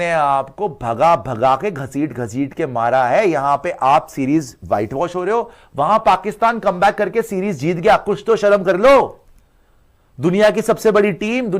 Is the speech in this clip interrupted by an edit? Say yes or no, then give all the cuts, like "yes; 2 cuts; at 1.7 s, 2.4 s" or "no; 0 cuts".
no; 0 cuts